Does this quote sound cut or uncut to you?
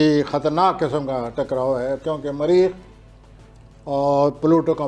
uncut